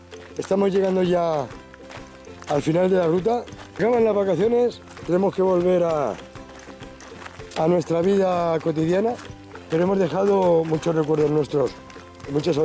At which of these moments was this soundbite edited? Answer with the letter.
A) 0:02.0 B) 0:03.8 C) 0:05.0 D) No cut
B